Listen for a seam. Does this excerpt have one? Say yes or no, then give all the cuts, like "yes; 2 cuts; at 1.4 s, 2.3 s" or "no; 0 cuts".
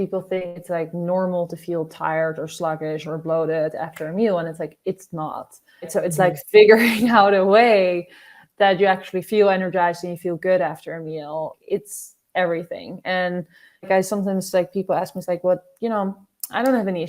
yes; 3 cuts; at 5.9 s, 11.6 s, 13.9 s